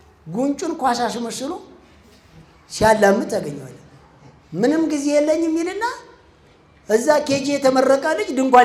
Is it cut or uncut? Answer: uncut